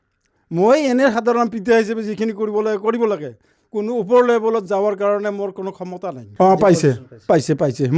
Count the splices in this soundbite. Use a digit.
1